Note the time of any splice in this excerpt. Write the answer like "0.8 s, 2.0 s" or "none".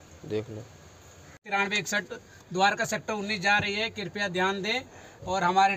1.4 s